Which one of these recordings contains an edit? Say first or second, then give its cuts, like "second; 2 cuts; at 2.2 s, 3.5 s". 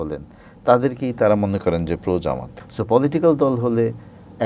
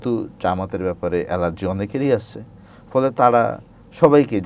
first; 1 cut; at 2.6 s